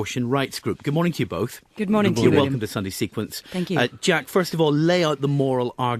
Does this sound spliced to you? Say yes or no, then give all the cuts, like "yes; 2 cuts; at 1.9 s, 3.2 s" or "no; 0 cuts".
yes; 1 cut; at 1.8 s